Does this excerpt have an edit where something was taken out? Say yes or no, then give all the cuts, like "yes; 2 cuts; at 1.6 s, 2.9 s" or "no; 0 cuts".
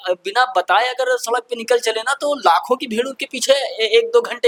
no; 0 cuts